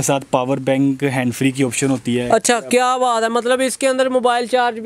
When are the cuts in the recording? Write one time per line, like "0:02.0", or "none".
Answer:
none